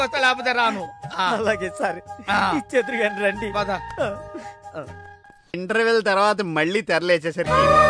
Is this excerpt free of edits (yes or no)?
no